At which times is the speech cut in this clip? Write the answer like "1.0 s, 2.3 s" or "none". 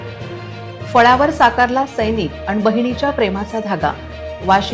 0.9 s